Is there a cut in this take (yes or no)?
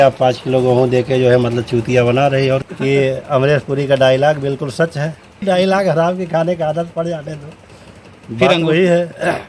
yes